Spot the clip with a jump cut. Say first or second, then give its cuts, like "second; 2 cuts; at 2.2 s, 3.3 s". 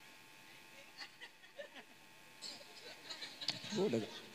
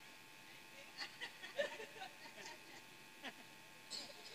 first; 1 cut; at 1.7 s